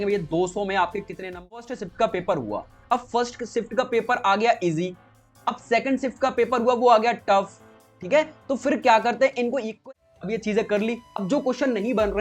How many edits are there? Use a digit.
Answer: 2